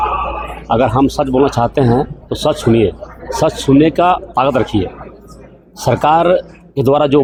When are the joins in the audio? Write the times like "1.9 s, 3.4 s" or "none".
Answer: none